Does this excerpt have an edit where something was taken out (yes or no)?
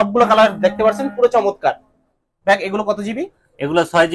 no